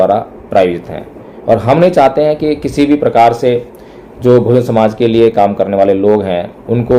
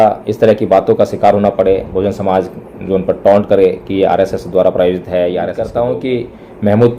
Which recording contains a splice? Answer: second; 1 cut; at 5.7 s

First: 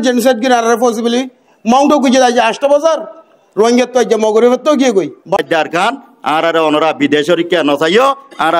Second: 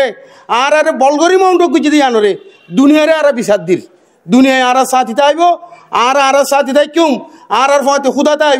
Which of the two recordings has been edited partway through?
first; 1 cut; at 5.4 s

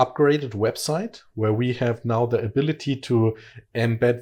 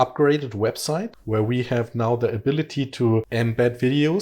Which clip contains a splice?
second; 2 cuts; at 1.2 s, 3.3 s

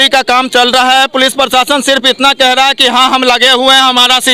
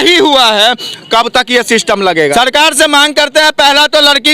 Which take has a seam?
second; 1 cut; at 2.3 s

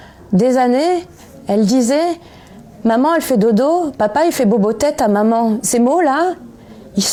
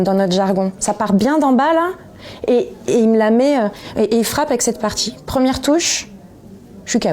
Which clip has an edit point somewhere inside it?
second; 1 cut; at 5.1 s

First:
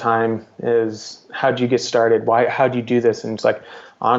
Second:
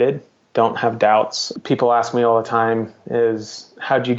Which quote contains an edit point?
second; 1 cut; at 1.4 s

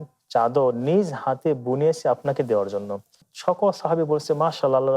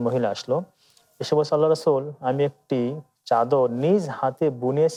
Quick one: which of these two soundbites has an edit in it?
first; 1 cut; at 3.2 s

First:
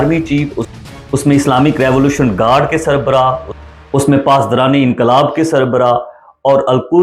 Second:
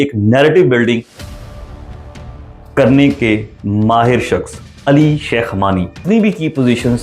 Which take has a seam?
second; 1 cut; at 6.0 s

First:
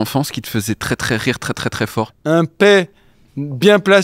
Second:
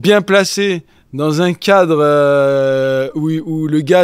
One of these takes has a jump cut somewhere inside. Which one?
first; 1 cut; at 2.1 s

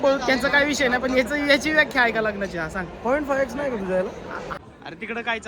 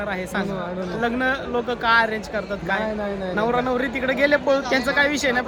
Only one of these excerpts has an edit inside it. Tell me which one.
first; 1 cut; at 4.6 s

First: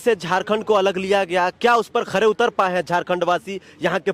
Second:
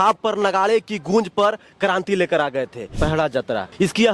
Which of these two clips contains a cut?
second; 1 cut; at 3.0 s

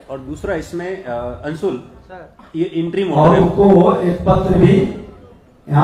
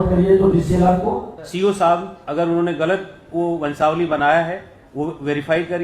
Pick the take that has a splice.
second; 1 cut; at 1.4 s

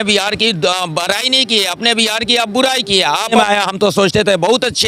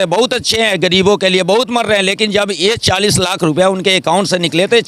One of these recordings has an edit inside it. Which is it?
first; 1 cut; at 3.3 s

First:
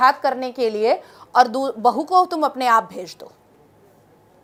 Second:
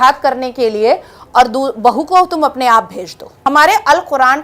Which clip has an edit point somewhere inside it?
second; 1 cut; at 3.3 s

